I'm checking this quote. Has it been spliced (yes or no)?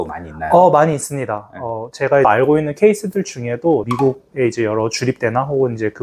yes